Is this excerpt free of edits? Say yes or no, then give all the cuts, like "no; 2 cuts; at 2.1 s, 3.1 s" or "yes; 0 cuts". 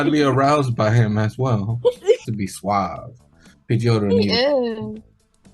no; 1 cut; at 2.2 s